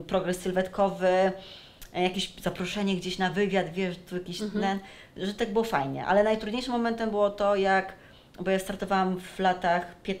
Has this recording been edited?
no; 0 cuts

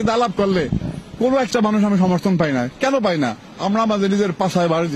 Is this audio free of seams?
yes; 0 cuts

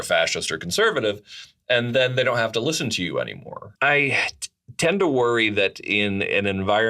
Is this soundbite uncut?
no; 1 cut; at 3.6 s

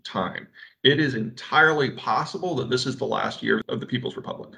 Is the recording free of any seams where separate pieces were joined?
no; 1 cut; at 3.6 s

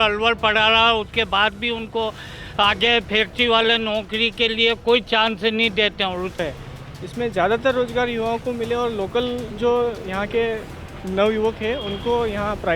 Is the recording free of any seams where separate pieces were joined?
no; 1 cut; at 6.4 s

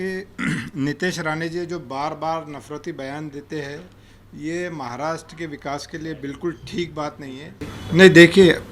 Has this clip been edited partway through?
yes; 1 cut; at 7.7 s

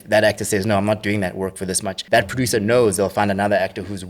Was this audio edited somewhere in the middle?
yes; 1 cut; at 1.9 s

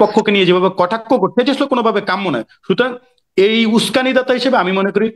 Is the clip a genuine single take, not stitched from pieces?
yes; 0 cuts

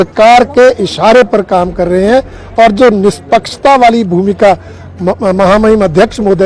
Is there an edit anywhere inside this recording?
no; 0 cuts

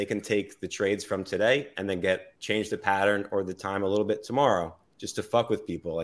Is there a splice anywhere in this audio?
no; 0 cuts

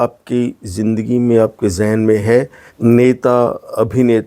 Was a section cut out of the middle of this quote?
yes; 1 cut; at 2.6 s

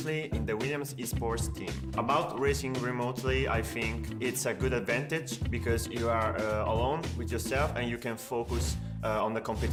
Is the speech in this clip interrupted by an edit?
no; 0 cuts

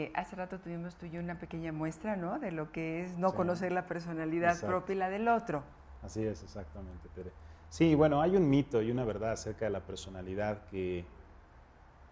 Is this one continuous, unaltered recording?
no; 1 cut; at 5.1 s

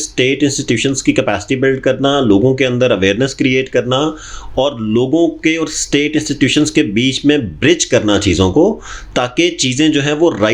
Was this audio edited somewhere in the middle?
no; 0 cuts

